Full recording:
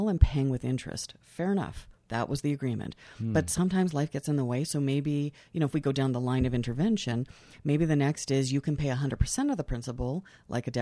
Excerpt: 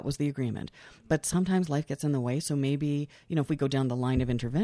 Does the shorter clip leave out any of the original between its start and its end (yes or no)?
no